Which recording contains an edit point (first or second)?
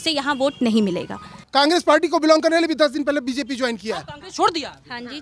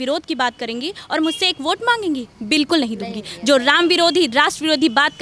first